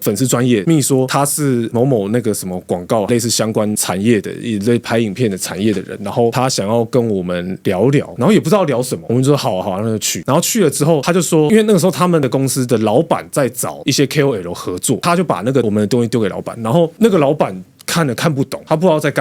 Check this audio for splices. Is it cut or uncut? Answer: uncut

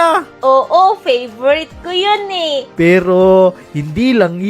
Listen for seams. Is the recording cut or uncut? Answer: cut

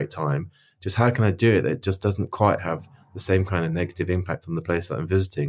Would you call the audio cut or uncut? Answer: uncut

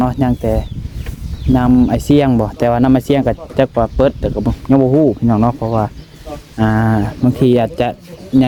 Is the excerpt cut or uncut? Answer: uncut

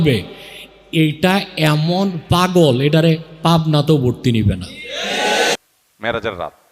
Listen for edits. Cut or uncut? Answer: cut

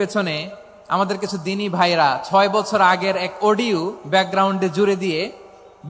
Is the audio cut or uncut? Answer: uncut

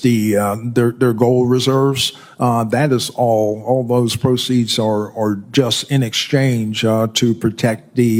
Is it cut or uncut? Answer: uncut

